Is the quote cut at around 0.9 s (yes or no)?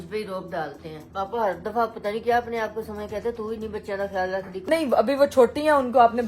yes